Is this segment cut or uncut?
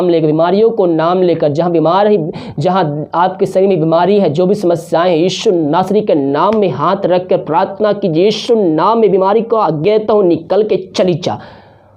uncut